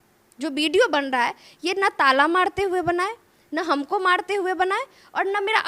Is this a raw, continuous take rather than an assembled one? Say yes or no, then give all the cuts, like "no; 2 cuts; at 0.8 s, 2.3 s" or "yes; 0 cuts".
yes; 0 cuts